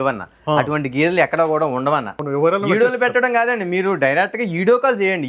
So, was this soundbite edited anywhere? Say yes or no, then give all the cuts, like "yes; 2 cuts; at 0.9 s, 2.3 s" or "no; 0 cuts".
yes; 1 cut; at 2.1 s